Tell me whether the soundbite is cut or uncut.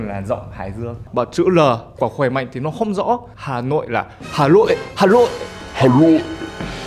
cut